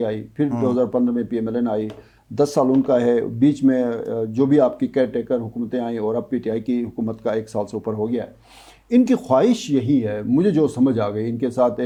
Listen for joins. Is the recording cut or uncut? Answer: uncut